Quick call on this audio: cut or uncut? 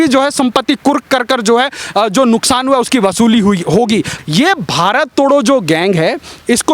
cut